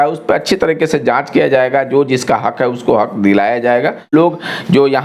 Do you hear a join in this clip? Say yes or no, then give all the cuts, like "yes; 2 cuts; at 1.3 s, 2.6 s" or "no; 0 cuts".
yes; 1 cut; at 4.1 s